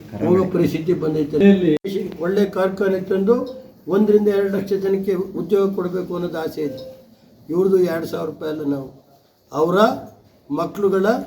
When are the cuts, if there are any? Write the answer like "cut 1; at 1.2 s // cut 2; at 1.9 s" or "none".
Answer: cut 1; at 1.8 s